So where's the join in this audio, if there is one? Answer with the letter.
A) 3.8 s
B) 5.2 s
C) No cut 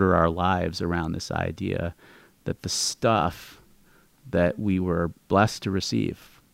B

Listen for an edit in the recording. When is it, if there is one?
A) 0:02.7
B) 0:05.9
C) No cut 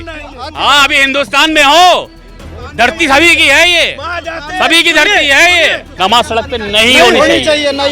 B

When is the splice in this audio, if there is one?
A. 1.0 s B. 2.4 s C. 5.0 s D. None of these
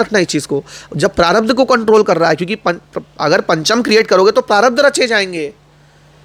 D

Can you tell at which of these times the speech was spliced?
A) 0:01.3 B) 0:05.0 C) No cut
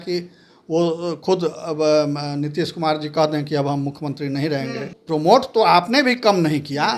B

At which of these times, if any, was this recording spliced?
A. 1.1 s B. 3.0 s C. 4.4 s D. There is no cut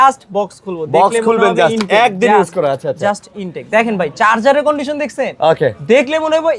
D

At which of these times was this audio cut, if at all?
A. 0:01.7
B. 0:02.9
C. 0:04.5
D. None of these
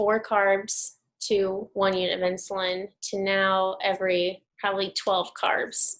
C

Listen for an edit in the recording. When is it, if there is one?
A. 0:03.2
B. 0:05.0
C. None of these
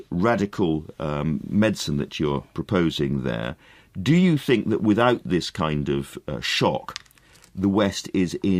A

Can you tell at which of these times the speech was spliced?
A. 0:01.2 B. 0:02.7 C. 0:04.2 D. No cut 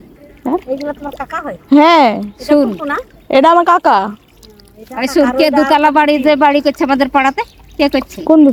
D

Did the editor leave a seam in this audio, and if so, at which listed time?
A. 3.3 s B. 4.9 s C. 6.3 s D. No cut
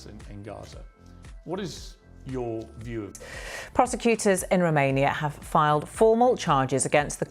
A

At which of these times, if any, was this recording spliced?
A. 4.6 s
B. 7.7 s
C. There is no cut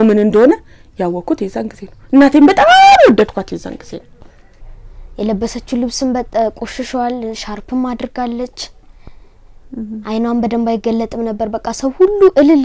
A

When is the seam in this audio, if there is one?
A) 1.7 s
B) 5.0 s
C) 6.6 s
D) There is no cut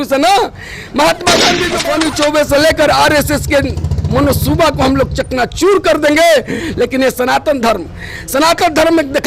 A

